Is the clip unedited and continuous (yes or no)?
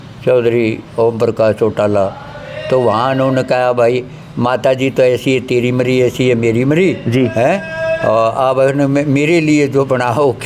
yes